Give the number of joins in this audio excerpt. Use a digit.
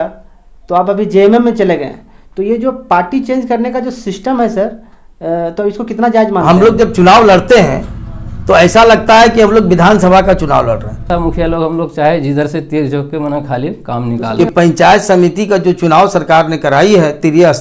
3